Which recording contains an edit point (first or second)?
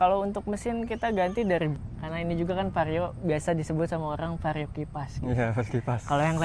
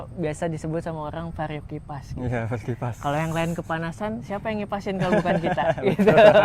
first